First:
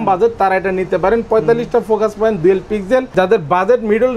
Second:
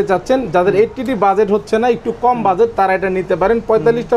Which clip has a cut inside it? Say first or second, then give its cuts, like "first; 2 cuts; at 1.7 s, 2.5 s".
first; 1 cut; at 3.1 s